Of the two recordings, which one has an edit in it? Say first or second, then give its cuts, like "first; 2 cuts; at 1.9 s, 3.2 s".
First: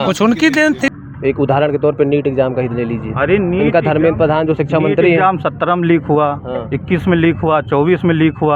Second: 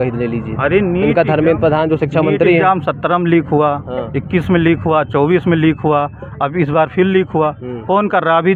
first; 1 cut; at 0.9 s